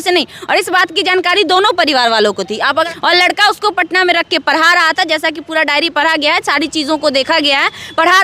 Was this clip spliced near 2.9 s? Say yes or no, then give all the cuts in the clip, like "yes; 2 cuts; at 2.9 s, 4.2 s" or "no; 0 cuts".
yes; 1 cut; at 2.9 s